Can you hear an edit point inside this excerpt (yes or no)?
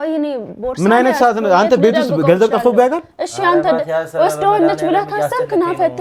no